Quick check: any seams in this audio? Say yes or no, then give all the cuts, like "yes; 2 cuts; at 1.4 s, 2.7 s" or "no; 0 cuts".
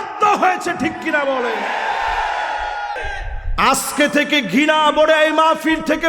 yes; 1 cut; at 3.0 s